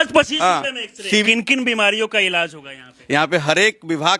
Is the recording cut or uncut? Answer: cut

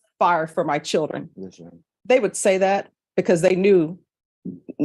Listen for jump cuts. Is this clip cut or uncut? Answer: uncut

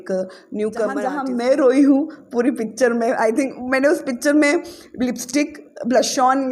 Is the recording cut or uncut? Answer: cut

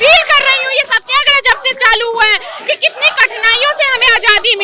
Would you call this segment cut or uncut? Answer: uncut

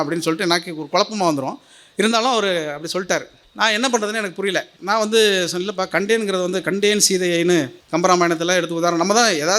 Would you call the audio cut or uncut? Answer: cut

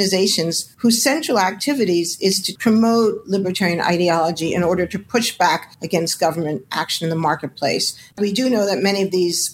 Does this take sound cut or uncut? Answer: cut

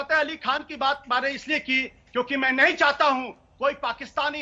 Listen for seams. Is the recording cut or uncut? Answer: uncut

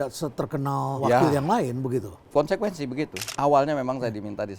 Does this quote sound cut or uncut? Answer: cut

